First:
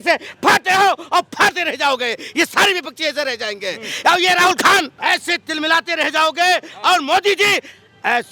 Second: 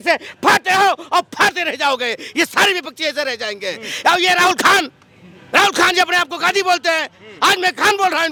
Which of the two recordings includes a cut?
first; 1 cut; at 4.9 s

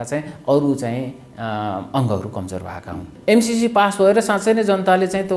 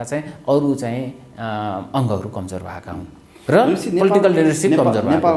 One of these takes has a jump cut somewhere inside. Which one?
first; 1 cut; at 3.1 s

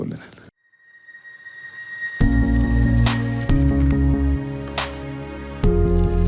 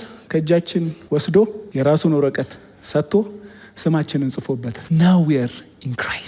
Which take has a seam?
second; 3 cuts; at 1.0 s, 1.6 s, 4.7 s

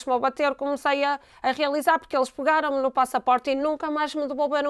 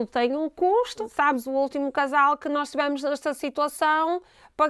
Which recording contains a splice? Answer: second; 1 cut; at 1.1 s

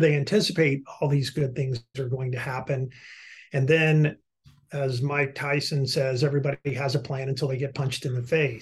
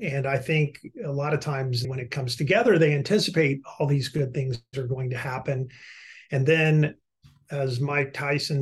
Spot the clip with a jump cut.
second; 1 cut; at 1.9 s

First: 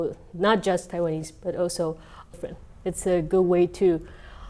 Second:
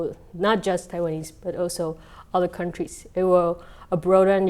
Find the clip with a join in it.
first; 1 cut; at 2.3 s

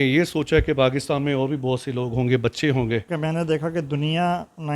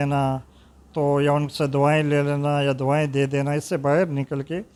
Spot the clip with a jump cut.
first; 1 cut; at 3.1 s

